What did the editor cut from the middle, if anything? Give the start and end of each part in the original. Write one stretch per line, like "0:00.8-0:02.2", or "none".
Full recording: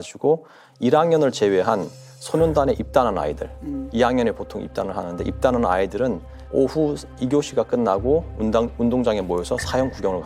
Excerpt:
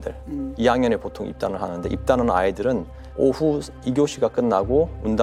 none